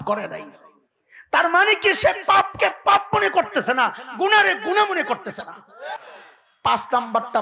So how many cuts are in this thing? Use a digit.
1